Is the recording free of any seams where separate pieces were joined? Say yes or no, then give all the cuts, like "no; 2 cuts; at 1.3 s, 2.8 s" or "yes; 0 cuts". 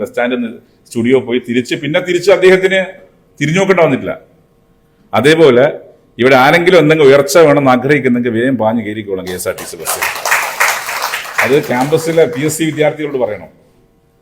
yes; 0 cuts